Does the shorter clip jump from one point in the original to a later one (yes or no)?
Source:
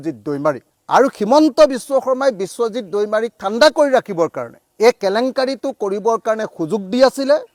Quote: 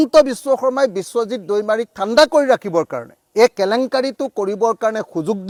no